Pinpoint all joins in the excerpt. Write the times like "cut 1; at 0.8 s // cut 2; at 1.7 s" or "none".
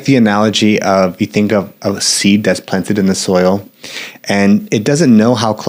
none